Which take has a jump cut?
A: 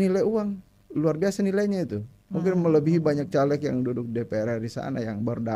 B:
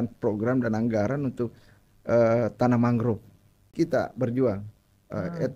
B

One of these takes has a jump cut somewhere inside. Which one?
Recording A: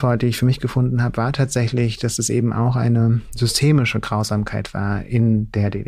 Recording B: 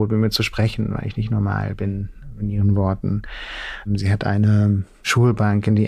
B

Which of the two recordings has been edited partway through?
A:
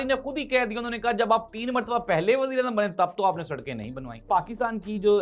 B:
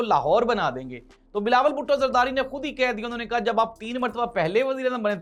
A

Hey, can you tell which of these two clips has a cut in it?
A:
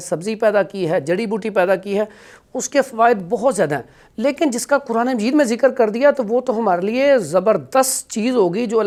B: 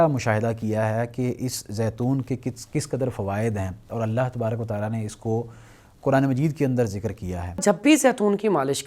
B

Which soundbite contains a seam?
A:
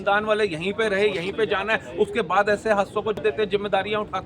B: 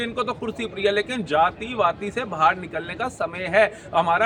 A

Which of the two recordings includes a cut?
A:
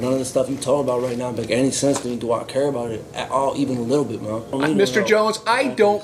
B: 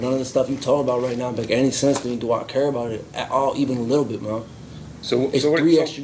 A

